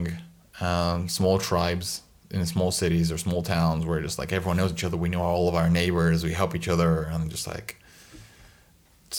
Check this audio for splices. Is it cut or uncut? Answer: uncut